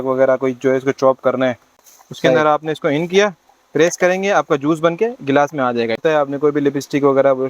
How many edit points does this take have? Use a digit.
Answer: 2